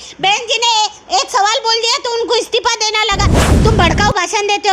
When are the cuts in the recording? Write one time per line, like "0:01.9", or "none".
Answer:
0:03.4